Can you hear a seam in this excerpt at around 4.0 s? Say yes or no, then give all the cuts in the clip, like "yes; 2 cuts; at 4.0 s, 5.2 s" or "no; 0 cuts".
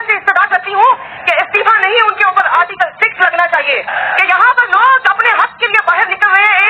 yes; 1 cut; at 4.0 s